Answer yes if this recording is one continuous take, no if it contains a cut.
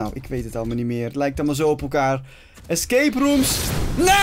yes